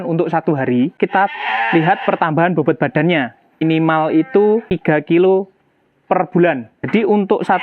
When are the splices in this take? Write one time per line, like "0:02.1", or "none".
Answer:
0:01.0
0:03.6
0:04.7
0:06.9

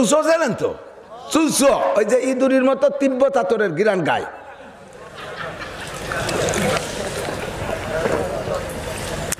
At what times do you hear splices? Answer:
none

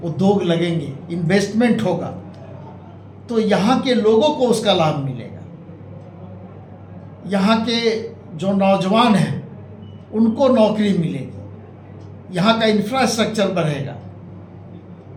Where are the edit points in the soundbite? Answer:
none

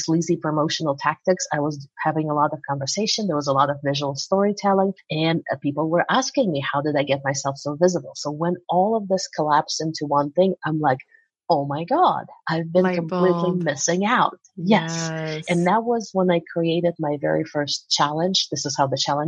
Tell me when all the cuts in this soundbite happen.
none

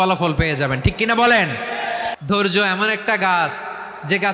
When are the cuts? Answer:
0:02.2

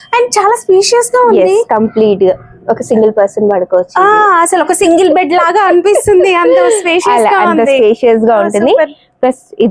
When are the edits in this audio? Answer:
none

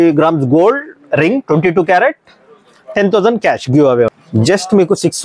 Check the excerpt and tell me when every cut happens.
0:04.1

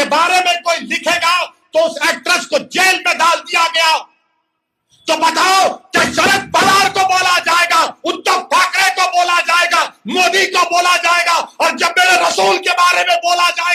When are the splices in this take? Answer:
none

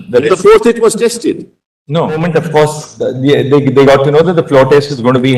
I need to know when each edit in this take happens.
0:02.2

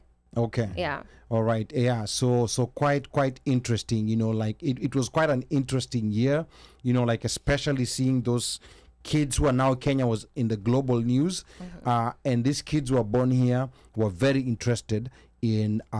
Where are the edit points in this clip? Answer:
none

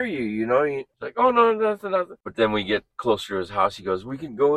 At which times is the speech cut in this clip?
0:00.9
0:02.2

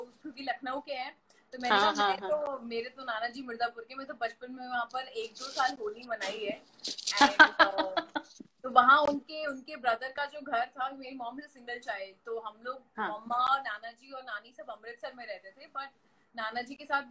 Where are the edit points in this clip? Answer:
none

